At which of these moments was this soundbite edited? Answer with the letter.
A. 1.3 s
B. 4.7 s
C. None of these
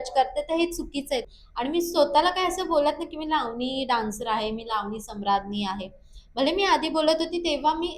A